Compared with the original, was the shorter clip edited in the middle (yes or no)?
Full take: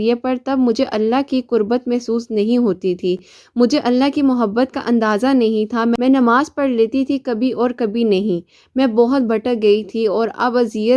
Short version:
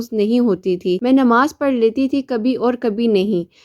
yes